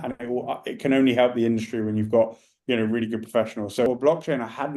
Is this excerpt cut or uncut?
cut